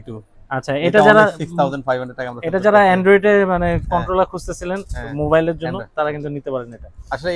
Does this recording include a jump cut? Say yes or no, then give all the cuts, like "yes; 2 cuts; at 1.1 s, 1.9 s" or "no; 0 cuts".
no; 0 cuts